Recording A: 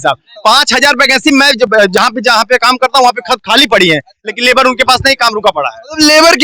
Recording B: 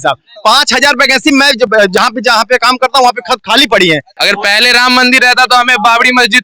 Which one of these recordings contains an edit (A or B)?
B